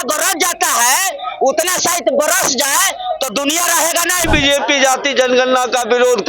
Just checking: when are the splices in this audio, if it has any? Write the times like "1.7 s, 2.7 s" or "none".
4.3 s